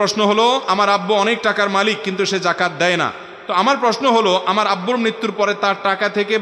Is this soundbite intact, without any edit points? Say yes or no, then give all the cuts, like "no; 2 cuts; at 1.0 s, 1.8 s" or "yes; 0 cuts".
yes; 0 cuts